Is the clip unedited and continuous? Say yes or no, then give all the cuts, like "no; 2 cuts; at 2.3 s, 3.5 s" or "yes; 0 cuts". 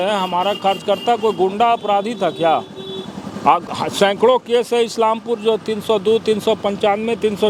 yes; 0 cuts